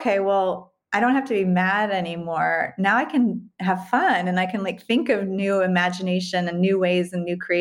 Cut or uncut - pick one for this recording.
uncut